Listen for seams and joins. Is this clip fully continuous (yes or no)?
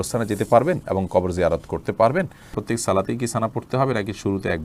no